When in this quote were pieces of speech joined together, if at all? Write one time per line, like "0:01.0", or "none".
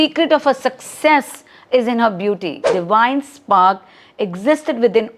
0:02.7